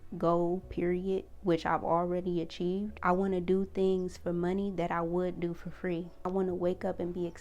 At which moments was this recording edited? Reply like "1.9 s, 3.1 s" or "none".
3.0 s, 6.2 s